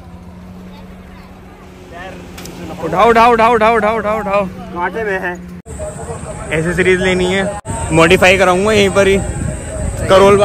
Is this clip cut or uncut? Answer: cut